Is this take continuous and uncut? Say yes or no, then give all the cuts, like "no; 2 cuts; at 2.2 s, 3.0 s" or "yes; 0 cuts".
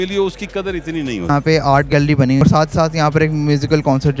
no; 2 cuts; at 1.3 s, 2.4 s